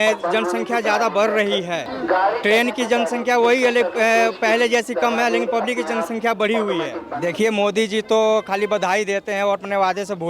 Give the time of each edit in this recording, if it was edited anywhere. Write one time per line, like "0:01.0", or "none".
0:01.9
0:07.1